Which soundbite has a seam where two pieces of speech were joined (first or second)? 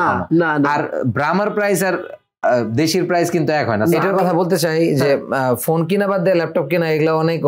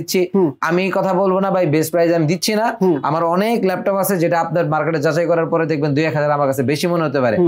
first